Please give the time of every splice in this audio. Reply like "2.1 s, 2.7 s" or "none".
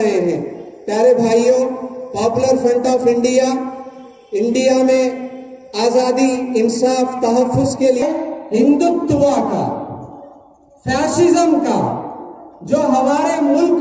8.0 s